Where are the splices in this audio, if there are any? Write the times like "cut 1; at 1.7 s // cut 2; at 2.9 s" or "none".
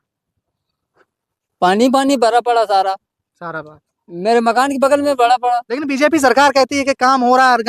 none